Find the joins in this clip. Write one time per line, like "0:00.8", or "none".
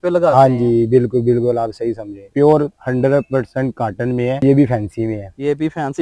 0:02.2
0:04.4